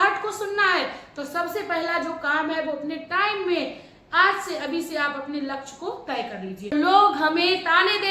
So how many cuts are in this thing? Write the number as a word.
one